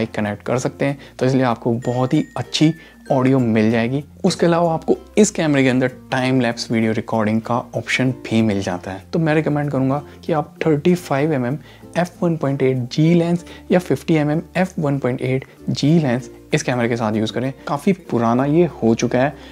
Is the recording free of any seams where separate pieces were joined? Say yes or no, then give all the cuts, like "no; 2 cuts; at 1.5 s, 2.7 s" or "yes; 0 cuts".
no; 3 cuts; at 4.1 s, 8.9 s, 17.6 s